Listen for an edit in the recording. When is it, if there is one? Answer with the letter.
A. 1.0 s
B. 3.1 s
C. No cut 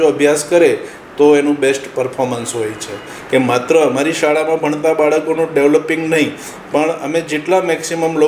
B